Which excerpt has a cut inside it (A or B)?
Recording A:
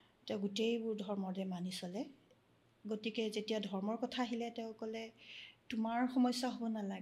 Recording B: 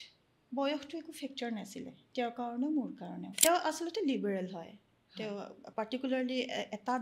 B